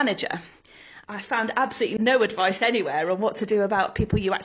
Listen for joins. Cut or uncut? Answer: cut